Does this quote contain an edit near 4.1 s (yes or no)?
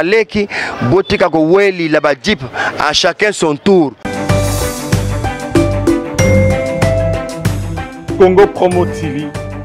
yes